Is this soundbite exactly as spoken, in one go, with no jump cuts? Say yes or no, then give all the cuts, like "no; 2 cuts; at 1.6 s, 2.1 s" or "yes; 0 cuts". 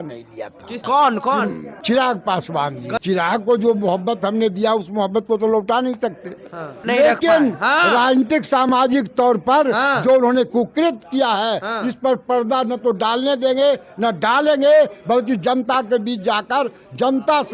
no; 4 cuts; at 0.8 s, 1.7 s, 3.0 s, 6.8 s